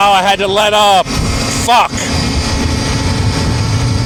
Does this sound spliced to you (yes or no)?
no